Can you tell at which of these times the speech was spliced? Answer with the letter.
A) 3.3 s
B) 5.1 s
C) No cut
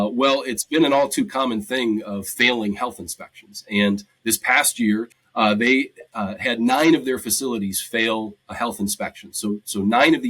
B